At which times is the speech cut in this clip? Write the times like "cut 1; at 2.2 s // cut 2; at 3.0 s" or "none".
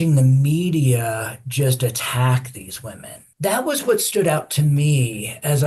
cut 1; at 3.3 s